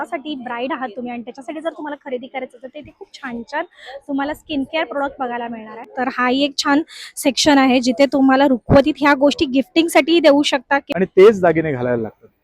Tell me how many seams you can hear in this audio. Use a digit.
2